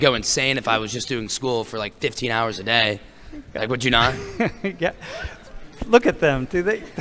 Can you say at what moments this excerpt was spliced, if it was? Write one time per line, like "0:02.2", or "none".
none